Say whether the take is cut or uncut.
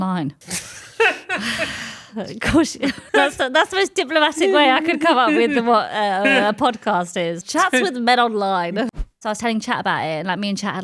cut